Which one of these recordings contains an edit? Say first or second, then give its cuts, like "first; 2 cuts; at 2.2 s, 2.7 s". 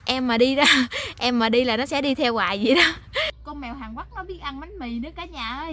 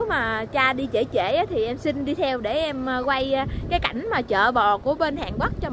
first; 1 cut; at 3.4 s